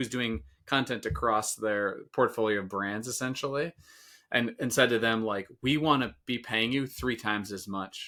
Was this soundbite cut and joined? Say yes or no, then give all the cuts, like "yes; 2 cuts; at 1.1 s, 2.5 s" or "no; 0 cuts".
no; 0 cuts